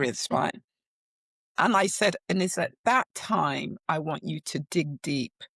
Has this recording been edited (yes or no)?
no